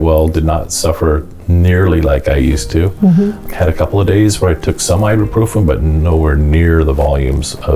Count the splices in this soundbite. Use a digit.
2